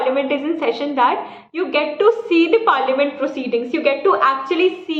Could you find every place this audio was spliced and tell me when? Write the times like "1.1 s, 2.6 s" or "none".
none